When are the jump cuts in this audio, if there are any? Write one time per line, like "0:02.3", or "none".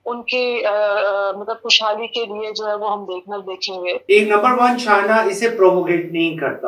0:04.0

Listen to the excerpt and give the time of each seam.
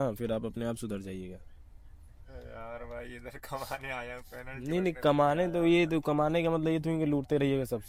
none

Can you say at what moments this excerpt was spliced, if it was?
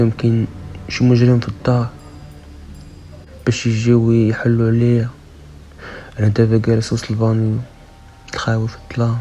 none

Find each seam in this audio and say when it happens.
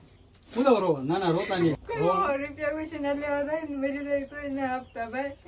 0:01.8

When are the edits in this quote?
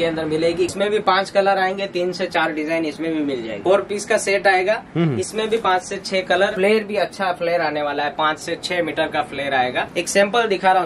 0:00.7
0:03.5
0:06.5
0:09.9

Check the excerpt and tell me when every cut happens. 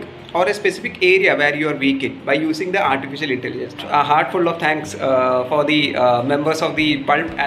0:03.8

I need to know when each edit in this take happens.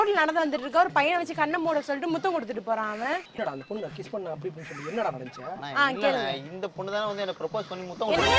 0:03.3

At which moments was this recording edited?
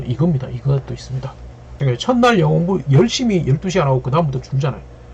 0:01.8

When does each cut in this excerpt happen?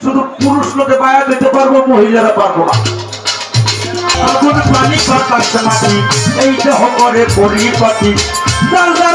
0:04.2

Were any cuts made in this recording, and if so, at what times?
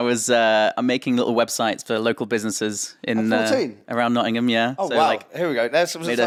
none

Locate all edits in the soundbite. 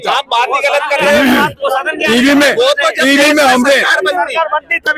none

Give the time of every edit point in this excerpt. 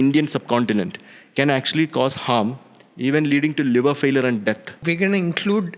0:04.8

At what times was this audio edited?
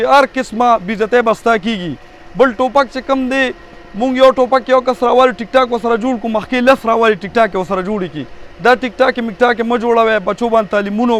none

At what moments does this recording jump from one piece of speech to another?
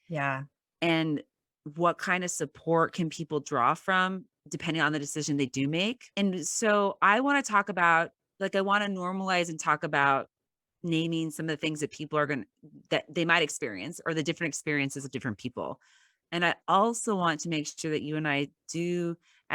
0:06.0

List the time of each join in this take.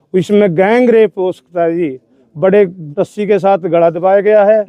0:02.8

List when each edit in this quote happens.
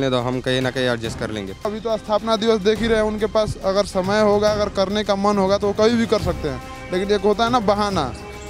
0:01.7

